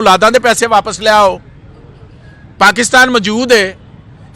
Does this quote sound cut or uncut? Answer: cut